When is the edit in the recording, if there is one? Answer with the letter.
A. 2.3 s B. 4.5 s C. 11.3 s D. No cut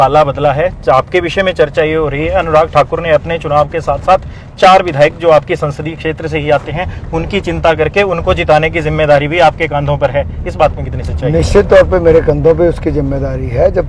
D